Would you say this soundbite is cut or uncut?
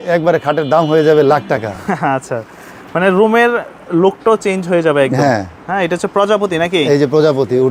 uncut